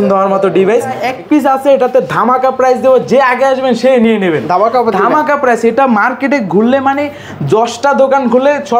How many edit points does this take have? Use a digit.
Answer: 1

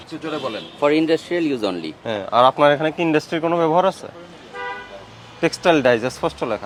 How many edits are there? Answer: 0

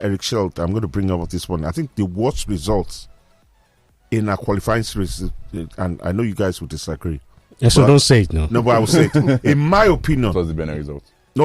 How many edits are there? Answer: 0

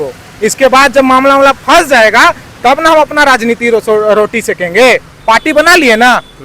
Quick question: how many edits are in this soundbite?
1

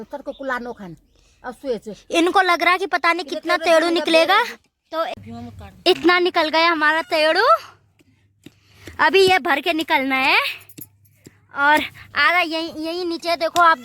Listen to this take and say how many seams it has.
1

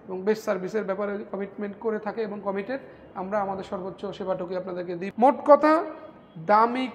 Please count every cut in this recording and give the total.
1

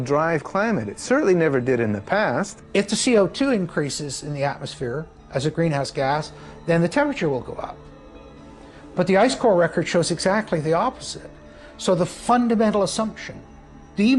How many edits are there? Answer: 1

